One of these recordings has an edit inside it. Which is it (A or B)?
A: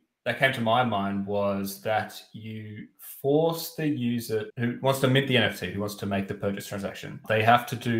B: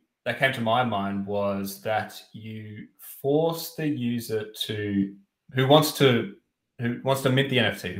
A